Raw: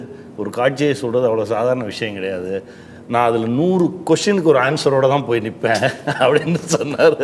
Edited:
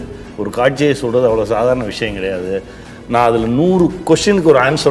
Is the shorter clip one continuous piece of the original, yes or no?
yes